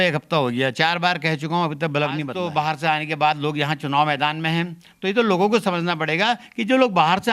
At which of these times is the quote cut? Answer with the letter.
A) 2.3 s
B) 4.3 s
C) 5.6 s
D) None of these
A